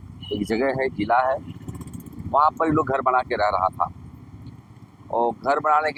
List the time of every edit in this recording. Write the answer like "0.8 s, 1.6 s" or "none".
none